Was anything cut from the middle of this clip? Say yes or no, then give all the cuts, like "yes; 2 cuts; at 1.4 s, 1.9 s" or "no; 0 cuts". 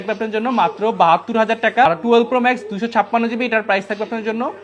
yes; 1 cut; at 1.9 s